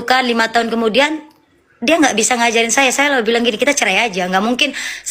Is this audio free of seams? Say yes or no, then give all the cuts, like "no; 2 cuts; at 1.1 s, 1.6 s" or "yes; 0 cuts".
yes; 0 cuts